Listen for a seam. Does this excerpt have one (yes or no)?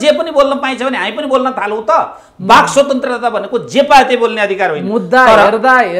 no